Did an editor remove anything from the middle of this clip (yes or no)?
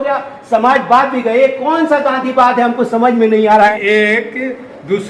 yes